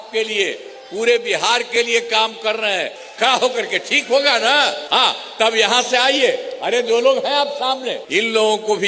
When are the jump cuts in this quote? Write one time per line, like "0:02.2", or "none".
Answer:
0:03.0
0:04.8
0:08.0